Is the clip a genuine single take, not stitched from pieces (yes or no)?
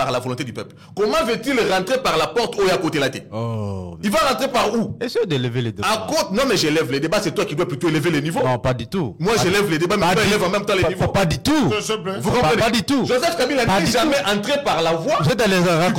yes